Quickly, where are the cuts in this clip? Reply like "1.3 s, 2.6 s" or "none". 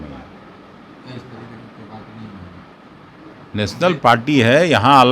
none